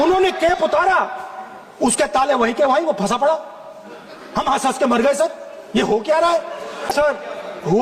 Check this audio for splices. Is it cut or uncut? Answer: cut